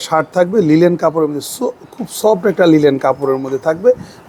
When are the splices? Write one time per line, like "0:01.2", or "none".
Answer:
none